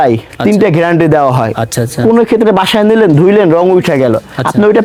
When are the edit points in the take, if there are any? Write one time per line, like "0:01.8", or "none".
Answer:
none